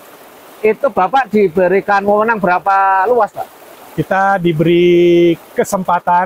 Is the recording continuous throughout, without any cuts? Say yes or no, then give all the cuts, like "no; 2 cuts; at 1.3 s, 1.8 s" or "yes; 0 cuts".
yes; 0 cuts